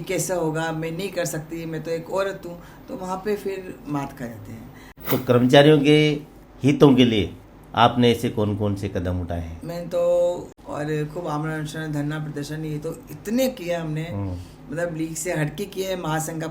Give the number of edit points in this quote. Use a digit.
2